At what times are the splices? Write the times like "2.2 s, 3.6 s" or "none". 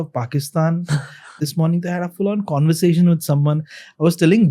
1.4 s

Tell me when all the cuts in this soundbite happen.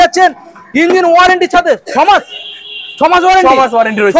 none

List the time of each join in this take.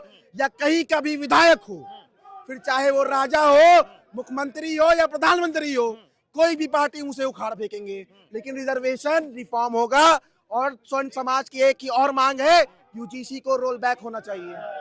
none

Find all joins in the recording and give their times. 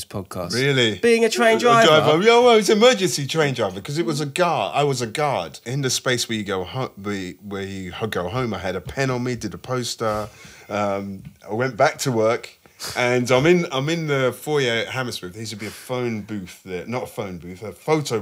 5.6 s

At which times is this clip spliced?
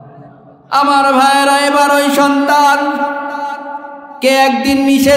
none

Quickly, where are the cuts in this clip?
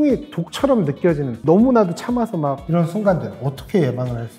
none

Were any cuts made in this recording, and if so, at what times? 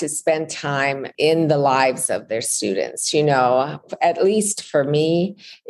1.1 s

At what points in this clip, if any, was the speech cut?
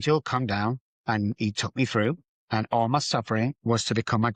1.0 s, 3.6 s

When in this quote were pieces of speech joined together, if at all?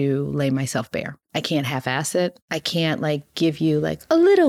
1.1 s, 2.5 s

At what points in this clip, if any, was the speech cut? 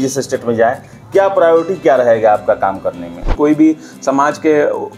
3.3 s

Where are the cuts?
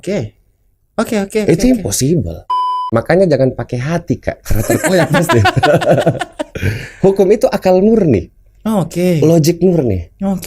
2.8 s

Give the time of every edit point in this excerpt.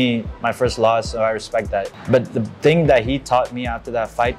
1.9 s

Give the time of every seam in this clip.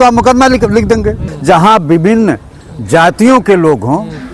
1.3 s

